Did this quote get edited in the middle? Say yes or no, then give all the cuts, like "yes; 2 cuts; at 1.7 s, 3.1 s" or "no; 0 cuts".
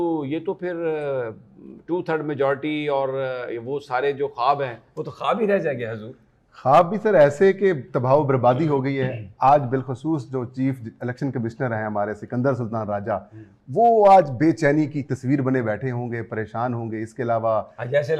no; 0 cuts